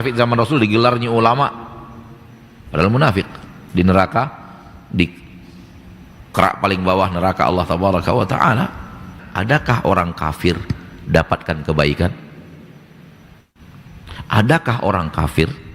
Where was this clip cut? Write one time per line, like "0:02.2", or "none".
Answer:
0:09.2
0:13.4